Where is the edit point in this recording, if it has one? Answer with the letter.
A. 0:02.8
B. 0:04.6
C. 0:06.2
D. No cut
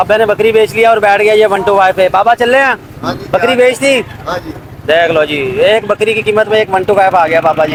D